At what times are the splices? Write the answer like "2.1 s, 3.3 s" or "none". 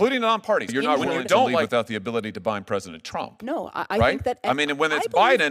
1.7 s